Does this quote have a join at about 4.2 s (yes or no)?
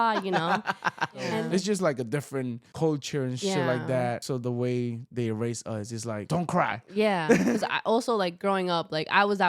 yes